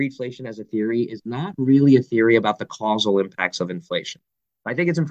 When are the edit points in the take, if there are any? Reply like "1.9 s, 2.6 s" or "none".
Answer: none